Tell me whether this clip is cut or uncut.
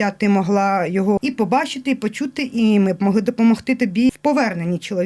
cut